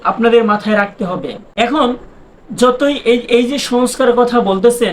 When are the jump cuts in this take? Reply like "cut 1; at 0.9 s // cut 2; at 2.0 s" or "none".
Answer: cut 1; at 1.4 s